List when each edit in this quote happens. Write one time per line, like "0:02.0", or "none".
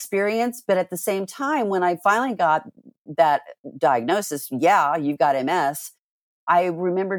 none